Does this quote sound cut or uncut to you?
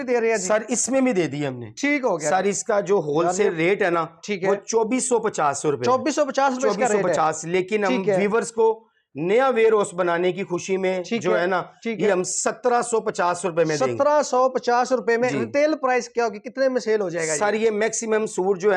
uncut